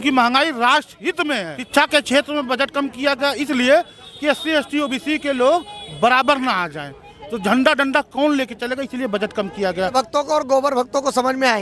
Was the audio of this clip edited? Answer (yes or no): yes